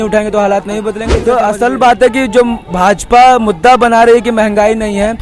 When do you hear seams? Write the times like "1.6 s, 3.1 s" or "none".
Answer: 1.1 s